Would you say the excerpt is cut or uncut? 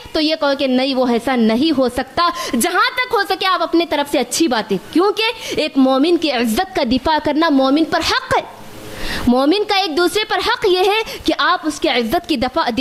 uncut